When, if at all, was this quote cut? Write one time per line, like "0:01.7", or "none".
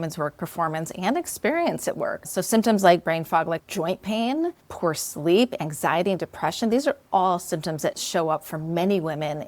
0:02.2
0:03.6
0:04.6
0:08.0